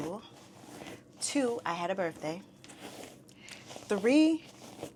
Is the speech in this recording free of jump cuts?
yes; 0 cuts

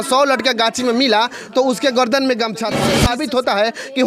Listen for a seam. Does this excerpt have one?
yes; 1 cut; at 2.9 s

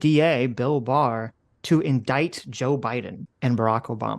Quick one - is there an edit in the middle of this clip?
yes; 1 cut; at 3.2 s

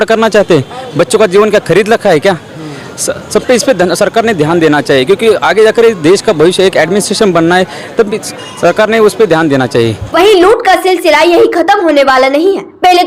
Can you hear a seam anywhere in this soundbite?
no; 0 cuts

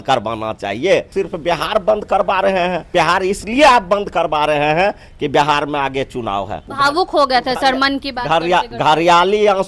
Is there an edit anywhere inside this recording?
yes; 3 cuts; at 1.1 s, 2.9 s, 6.6 s

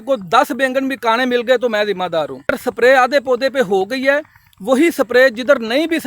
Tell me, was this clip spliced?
yes; 1 cut; at 2.5 s

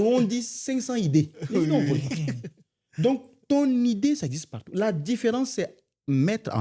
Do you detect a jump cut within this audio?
no; 0 cuts

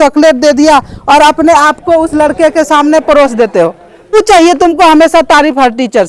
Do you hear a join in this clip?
yes; 1 cut; at 4.1 s

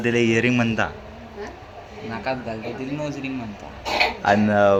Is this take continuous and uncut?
yes; 0 cuts

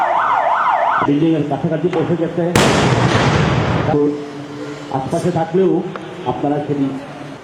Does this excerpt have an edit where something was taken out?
yes; 1 cut; at 0.9 s

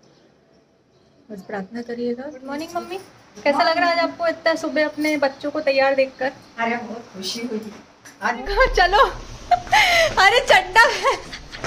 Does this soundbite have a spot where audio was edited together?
yes; 2 cuts; at 2.7 s, 8.4 s

